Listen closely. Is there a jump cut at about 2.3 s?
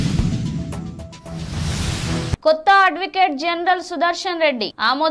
yes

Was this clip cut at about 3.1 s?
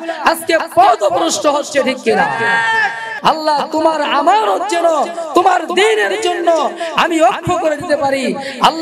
yes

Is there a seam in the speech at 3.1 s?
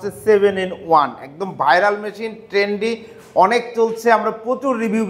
no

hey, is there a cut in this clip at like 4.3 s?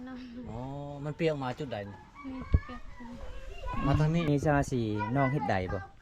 yes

